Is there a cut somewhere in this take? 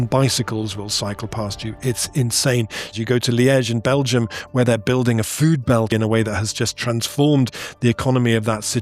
yes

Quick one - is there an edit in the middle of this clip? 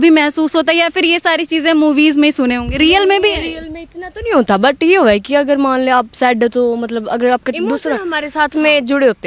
no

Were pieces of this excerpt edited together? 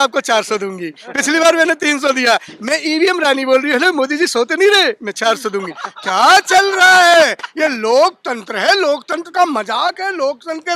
no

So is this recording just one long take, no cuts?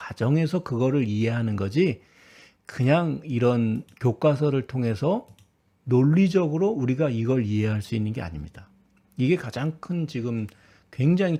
yes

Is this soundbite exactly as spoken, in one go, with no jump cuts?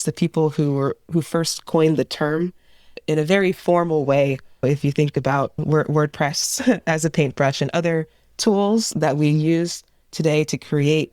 no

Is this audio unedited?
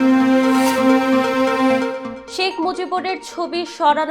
no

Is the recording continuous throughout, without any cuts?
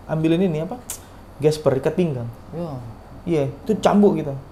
yes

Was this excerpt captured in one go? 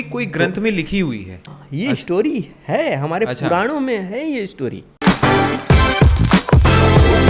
no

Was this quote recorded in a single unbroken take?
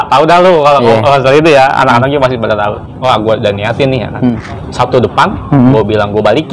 no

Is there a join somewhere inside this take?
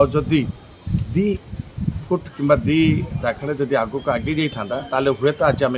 no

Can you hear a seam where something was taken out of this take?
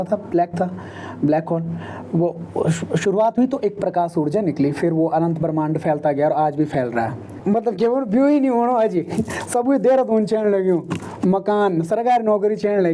yes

